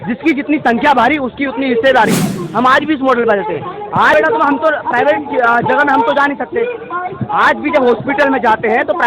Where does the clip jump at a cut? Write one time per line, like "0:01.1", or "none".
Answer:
0:04.1